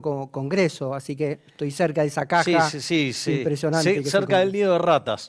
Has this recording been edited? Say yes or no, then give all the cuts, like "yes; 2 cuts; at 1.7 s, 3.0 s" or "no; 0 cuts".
no; 0 cuts